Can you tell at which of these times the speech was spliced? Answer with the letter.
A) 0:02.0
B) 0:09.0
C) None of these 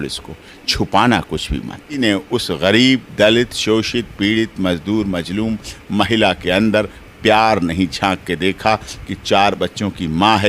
A